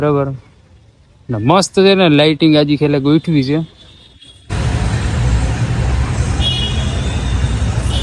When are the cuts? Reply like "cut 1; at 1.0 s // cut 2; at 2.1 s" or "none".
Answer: cut 1; at 4.5 s